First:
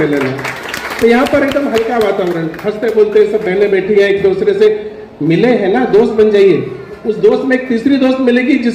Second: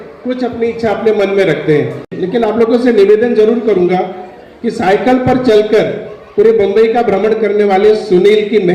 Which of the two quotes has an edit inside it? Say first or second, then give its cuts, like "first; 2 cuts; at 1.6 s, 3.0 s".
second; 1 cut; at 2.1 s